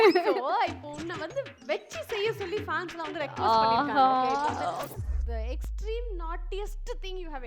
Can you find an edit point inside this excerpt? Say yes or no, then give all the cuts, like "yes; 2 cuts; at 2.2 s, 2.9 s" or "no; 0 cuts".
yes; 1 cut; at 4.9 s